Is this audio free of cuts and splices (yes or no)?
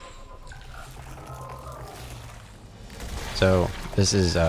yes